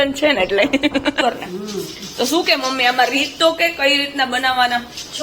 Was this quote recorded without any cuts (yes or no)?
no